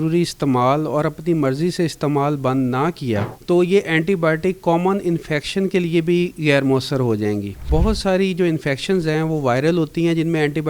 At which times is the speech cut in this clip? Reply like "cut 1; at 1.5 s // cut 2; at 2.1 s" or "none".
cut 1; at 3.3 s // cut 2; at 7.7 s